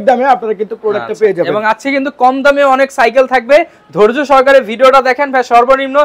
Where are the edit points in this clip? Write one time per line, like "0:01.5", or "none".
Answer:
none